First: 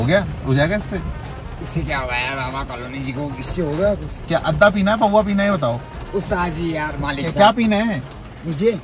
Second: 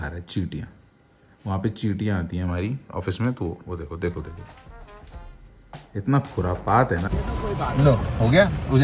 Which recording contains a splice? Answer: second; 1 cut; at 7.1 s

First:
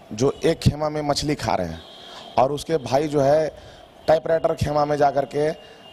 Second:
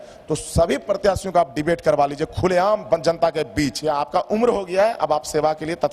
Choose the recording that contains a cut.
second; 1 cut; at 3.8 s

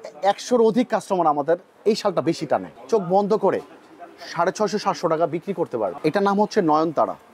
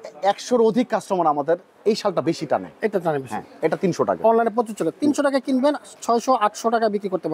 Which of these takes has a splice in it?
first; 2 cuts; at 2.7 s, 6.0 s

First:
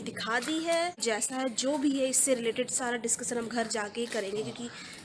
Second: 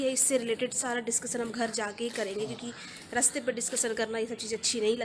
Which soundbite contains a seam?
first; 1 cut; at 1.0 s

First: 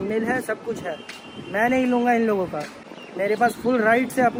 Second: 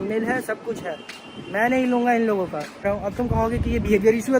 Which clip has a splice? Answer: second; 1 cut; at 2.9 s

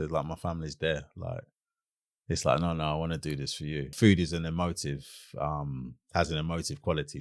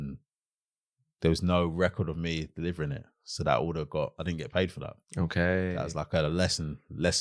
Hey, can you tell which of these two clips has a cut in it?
first; 1 cut; at 3.9 s

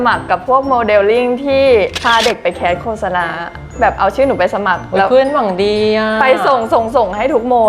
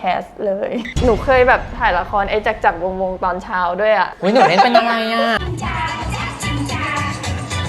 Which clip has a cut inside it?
second; 2 cuts; at 0.9 s, 5.4 s

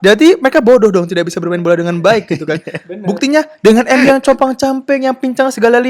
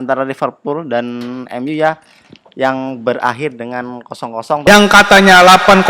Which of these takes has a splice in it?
second; 1 cut; at 4.7 s

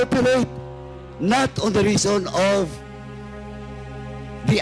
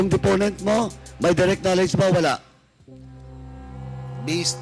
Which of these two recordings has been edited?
second; 2 cuts; at 2.4 s, 3.9 s

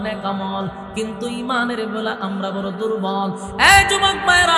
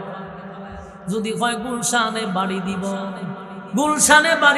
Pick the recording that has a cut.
second; 1 cut; at 3.5 s

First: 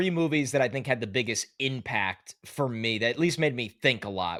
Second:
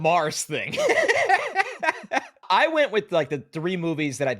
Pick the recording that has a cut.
second; 1 cut; at 2.4 s

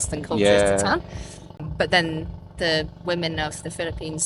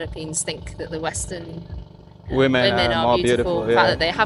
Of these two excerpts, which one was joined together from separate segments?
first; 1 cut; at 1.5 s

